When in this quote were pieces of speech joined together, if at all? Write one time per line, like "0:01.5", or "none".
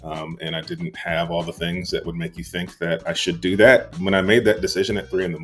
0:03.9